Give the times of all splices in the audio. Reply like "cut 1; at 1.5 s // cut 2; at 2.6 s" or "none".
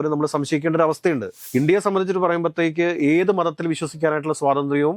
cut 1; at 1.3 s